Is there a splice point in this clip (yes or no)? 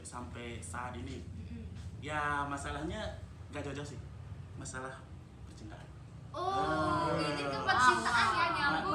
no